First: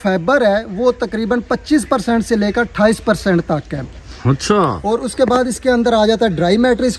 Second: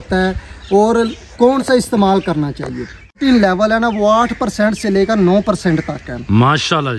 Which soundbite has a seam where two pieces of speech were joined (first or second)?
second